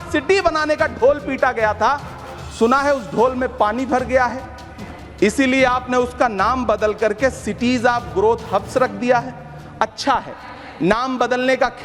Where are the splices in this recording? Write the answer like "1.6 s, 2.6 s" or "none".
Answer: none